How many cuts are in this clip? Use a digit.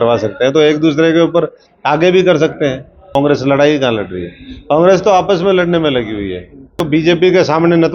2